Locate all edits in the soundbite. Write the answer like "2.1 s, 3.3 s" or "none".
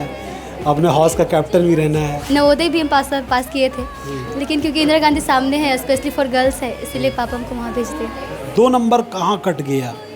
2.3 s, 8.5 s